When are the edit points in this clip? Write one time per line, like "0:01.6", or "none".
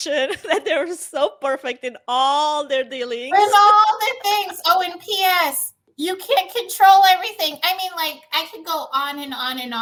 none